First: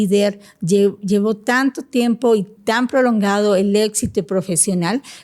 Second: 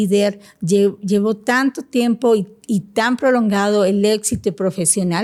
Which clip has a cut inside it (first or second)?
first